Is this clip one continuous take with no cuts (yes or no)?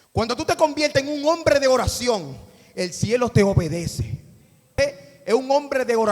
no